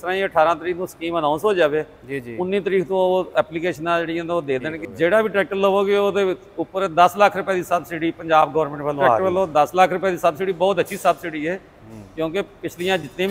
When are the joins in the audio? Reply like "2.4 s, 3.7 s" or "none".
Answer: 4.8 s, 9.2 s